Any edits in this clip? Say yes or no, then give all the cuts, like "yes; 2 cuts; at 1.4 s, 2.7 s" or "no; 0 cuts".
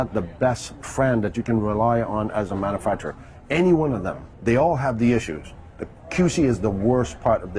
yes; 1 cut; at 4.3 s